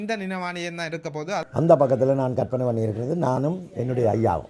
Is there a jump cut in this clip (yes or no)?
yes